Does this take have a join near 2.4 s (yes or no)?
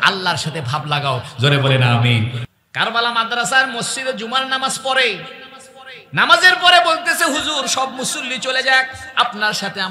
yes